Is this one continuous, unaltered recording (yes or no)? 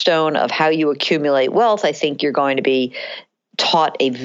yes